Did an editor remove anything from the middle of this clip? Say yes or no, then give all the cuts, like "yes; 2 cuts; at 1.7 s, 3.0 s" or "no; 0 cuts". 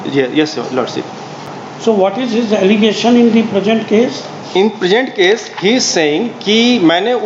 no; 0 cuts